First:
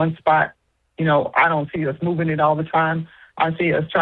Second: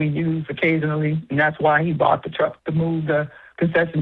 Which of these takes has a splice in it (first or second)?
second